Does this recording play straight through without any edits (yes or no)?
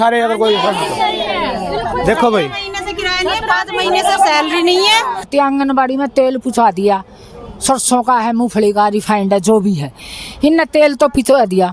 no